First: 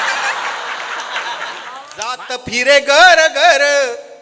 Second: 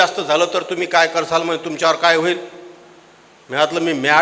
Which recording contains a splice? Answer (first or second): first